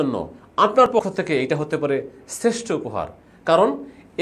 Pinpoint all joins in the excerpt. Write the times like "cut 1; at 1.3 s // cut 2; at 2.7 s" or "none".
cut 1; at 0.9 s